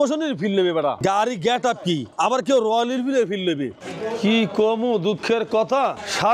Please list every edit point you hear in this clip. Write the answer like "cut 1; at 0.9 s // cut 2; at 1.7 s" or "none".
cut 1; at 1.0 s // cut 2; at 2.1 s // cut 3; at 3.8 s